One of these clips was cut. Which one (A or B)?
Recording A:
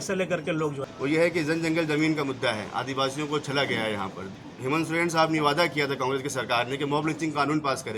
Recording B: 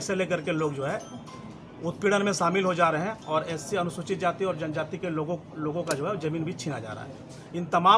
A